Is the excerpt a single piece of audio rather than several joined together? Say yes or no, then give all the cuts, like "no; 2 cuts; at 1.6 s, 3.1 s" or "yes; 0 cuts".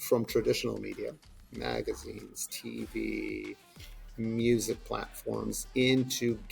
yes; 0 cuts